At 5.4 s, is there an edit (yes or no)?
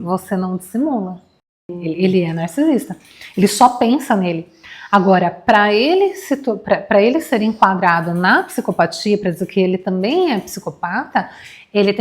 no